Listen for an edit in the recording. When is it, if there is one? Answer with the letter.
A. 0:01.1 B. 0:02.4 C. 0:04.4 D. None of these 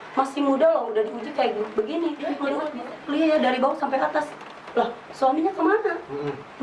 B